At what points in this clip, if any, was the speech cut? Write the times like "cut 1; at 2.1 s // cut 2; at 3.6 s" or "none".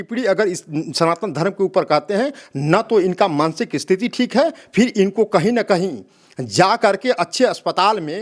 none